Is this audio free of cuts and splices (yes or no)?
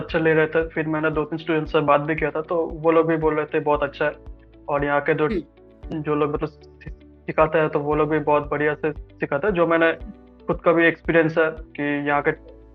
yes